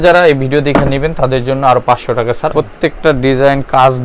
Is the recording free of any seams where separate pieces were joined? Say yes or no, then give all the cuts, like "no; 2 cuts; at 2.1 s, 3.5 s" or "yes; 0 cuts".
no; 1 cut; at 2.5 s